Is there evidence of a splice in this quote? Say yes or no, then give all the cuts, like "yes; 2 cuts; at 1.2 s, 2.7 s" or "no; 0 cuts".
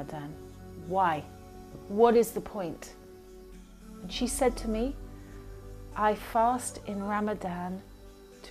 no; 0 cuts